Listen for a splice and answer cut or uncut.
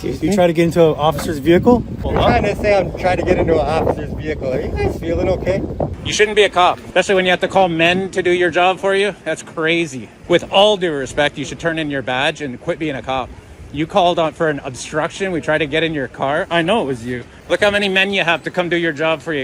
cut